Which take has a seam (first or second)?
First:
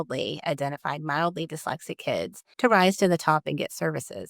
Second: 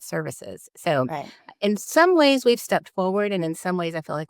first